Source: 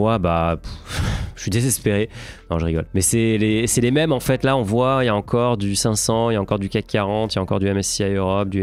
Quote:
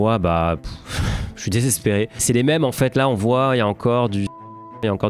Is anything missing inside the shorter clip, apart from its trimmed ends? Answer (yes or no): yes